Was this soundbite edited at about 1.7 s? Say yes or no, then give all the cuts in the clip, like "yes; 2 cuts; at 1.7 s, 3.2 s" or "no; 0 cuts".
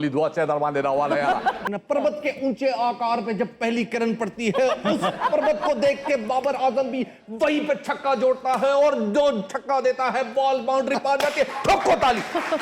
yes; 1 cut; at 1.7 s